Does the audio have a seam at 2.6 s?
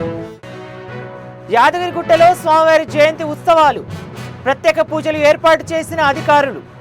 no; 1 cut; at 1.4 s

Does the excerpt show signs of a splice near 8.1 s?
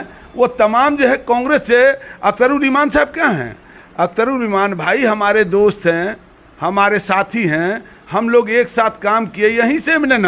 no; 0 cuts

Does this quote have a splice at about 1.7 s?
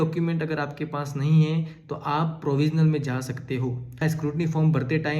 no; 1 cut; at 4.0 s

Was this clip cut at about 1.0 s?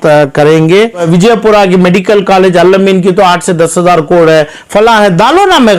yes; 1 cut; at 1.0 s

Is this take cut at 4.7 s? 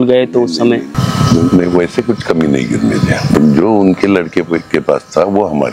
no; 2 cuts; at 1.0 s, 3.4 s

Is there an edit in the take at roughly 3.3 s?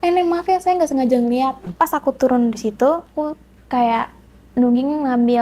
no; 1 cut; at 1.7 s

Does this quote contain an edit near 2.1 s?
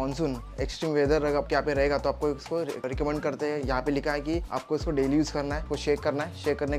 no; 2 cuts; at 4.5 s, 5.7 s

